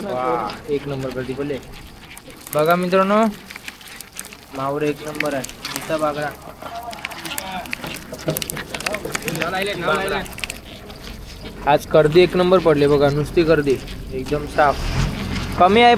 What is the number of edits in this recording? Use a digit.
0